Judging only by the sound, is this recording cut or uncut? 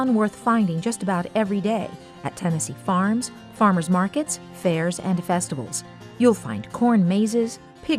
uncut